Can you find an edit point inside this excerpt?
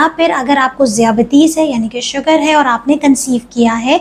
no; 0 cuts

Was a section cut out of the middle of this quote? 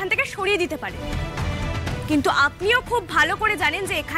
yes; 1 cut; at 2.0 s

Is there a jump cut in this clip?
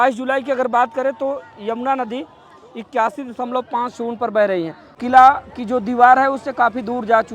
yes; 1 cut; at 4.8 s

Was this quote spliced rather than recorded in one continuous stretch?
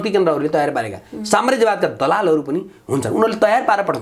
no; 0 cuts

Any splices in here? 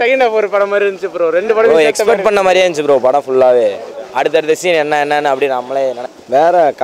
no; 0 cuts

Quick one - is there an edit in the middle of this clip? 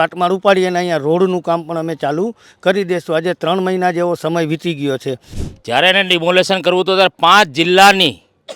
yes; 1 cut; at 5.3 s

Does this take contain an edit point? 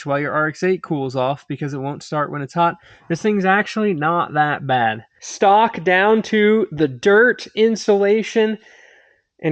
no; 0 cuts

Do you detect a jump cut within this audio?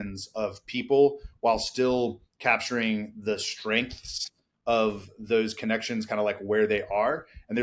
no; 0 cuts

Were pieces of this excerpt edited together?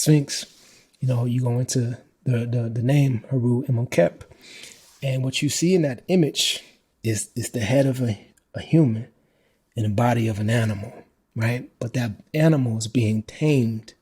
no; 0 cuts

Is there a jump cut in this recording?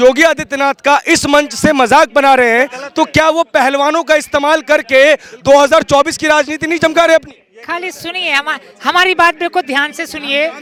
no; 0 cuts

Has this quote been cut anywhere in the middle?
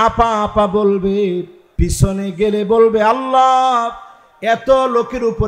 yes; 1 cut; at 1.6 s

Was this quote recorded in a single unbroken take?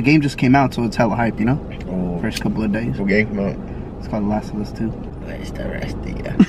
no; 1 cut; at 5.1 s

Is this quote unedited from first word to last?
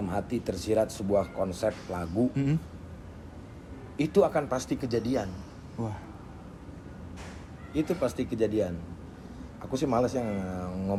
yes; 0 cuts

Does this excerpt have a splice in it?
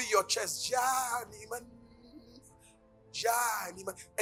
no; 0 cuts

